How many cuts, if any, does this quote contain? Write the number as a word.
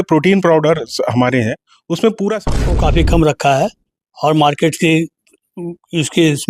one